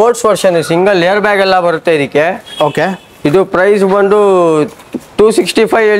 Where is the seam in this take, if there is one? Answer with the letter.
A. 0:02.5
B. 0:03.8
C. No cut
C